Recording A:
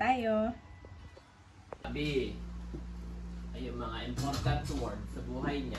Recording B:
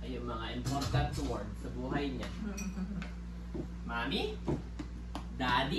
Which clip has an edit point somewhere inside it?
A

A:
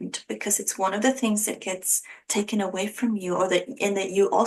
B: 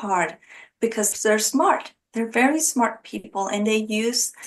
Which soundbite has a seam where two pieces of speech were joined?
B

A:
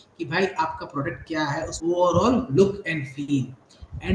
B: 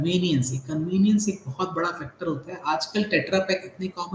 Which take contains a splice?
A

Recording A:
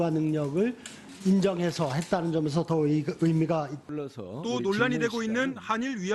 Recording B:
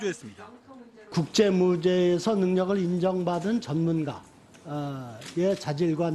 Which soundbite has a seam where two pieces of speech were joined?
B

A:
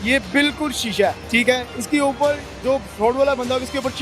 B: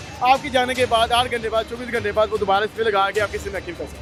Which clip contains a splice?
A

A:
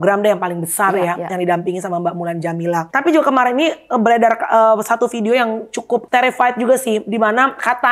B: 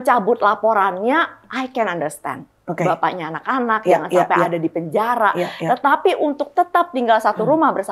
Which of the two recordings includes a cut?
A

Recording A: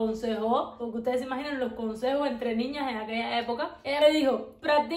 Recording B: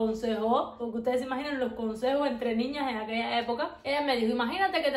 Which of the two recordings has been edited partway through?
A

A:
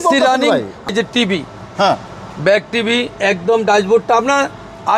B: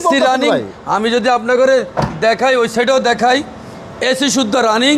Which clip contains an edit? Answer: A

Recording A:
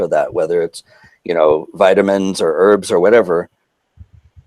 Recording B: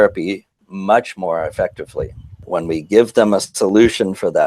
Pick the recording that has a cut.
B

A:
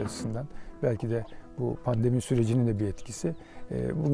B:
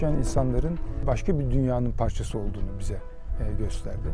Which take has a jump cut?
B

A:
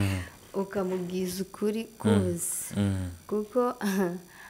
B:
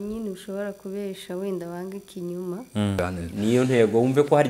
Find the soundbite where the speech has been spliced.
B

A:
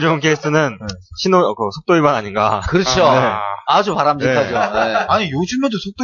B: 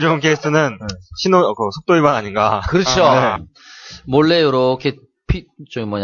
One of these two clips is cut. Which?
B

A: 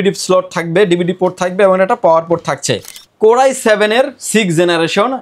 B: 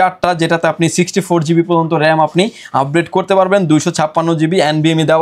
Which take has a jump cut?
A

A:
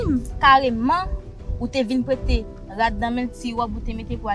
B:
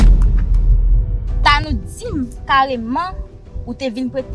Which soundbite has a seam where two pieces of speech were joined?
B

